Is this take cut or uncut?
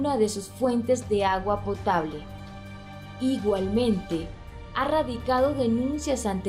uncut